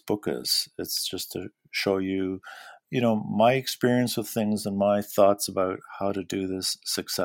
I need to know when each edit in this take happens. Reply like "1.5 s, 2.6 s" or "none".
2.8 s